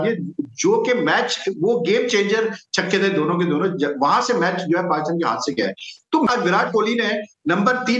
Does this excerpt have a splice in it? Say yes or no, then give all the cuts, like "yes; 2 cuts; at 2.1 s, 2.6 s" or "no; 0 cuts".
yes; 1 cut; at 6.3 s